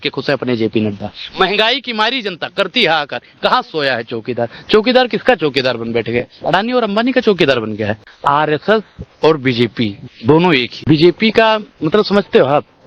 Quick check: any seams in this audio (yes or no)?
yes